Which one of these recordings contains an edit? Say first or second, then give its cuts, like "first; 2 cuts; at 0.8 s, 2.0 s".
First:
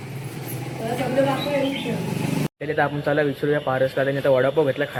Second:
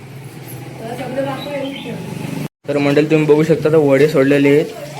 second; 1 cut; at 2.6 s